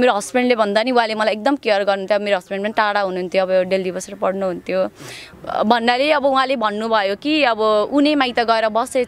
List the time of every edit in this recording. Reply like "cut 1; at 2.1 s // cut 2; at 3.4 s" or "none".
cut 1; at 5.3 s